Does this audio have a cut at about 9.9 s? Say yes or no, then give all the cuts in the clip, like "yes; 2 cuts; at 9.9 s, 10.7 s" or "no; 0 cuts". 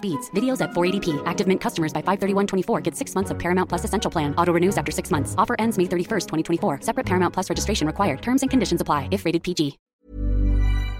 yes; 1 cut; at 9.9 s